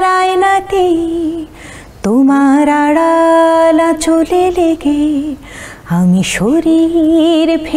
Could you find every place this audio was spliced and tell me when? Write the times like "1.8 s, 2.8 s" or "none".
none